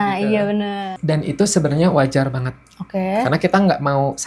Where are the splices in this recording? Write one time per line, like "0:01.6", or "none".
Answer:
0:01.0